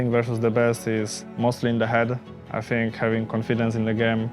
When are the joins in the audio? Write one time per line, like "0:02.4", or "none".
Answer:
0:01.2